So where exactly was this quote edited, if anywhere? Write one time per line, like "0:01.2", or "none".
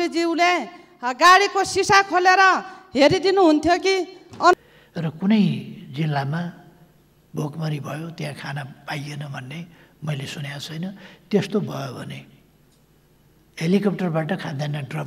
0:04.5